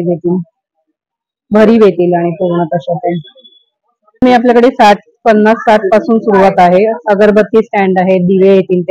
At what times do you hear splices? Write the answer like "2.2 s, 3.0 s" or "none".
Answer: 4.2 s